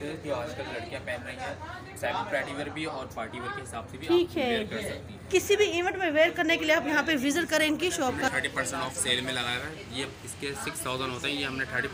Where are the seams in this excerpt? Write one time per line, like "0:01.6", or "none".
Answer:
0:05.1
0:08.3